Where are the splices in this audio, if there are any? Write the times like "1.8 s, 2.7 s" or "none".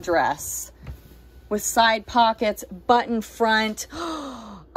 none

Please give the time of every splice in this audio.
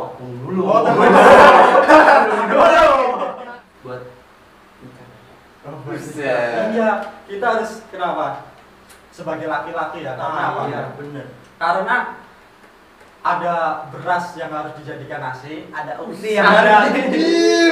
3.2 s

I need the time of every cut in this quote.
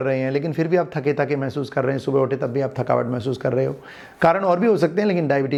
none

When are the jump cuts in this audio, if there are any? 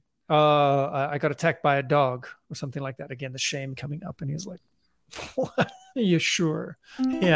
none

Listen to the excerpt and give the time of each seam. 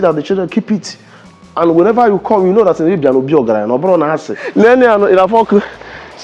4.4 s

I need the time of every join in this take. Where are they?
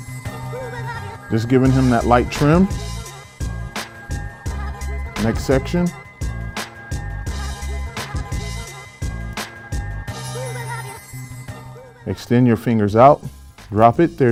none

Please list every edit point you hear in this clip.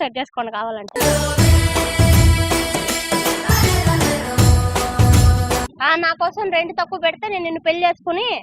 5.7 s

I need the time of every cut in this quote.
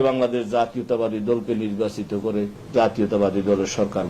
2.6 s

